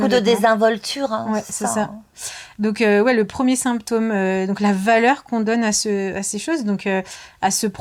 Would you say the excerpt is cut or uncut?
uncut